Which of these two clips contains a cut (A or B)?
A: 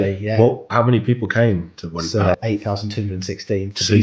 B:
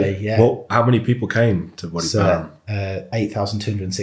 A